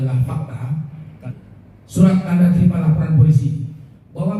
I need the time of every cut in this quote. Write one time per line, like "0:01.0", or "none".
0:01.2